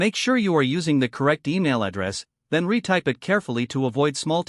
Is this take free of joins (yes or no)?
yes